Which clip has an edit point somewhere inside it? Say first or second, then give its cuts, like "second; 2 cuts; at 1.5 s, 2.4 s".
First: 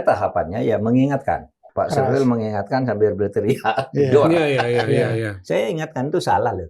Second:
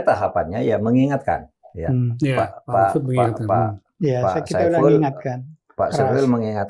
first; 1 cut; at 1.6 s